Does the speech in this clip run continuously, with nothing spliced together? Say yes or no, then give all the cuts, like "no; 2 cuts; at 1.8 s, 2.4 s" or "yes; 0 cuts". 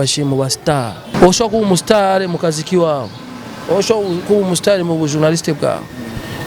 no; 1 cut; at 1.0 s